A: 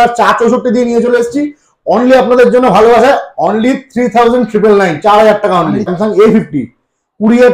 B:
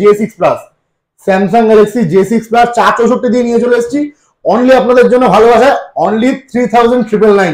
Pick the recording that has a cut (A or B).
A